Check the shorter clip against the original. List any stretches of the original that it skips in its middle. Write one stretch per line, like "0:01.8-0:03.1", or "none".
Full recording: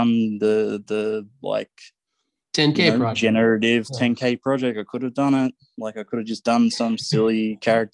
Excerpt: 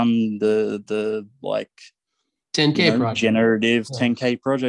none